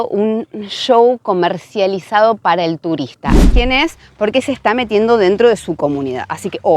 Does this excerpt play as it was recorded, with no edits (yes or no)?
no